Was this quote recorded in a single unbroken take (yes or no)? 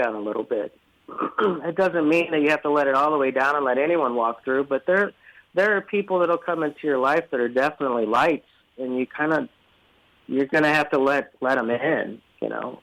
yes